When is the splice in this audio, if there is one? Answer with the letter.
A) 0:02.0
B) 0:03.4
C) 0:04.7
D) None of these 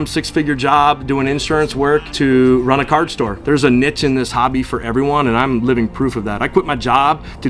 B